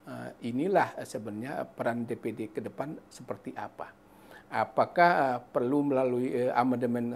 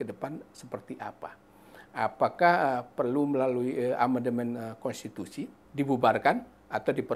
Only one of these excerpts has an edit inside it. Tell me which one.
second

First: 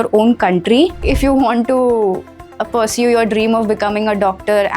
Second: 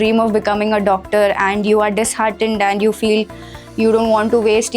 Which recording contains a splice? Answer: first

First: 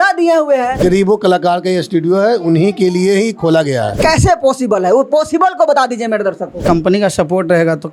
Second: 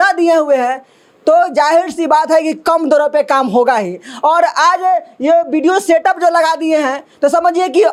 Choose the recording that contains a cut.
first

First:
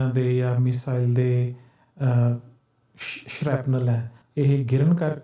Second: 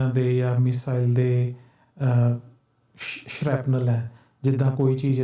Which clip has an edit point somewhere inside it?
first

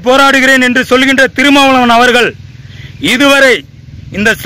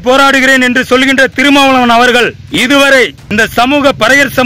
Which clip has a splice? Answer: second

